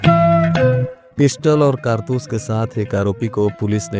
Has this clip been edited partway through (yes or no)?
yes